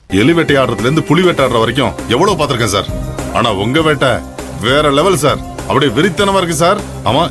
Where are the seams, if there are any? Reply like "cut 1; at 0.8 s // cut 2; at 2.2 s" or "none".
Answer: none